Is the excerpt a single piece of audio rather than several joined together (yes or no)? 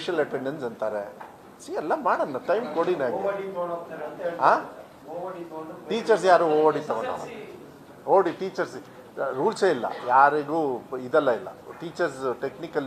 yes